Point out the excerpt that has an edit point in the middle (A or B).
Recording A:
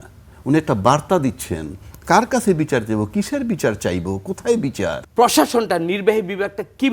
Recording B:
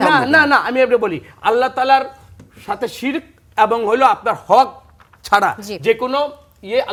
A